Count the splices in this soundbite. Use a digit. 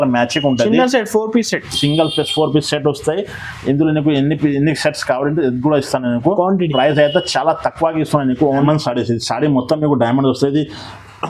1